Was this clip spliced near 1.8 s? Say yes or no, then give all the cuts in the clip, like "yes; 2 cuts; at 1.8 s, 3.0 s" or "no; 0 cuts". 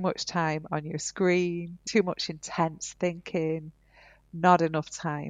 yes; 1 cut; at 1.8 s